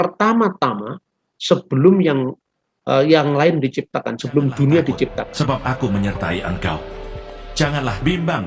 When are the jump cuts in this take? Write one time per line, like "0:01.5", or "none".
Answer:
0:05.3